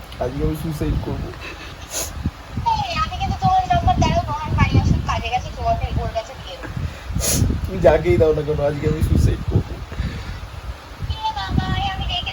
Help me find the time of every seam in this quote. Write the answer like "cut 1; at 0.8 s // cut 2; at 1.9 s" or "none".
none